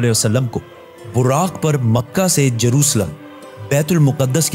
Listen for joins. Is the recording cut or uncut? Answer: uncut